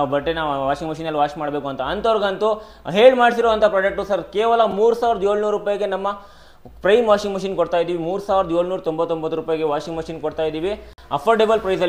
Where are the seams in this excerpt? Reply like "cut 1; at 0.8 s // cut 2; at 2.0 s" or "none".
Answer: none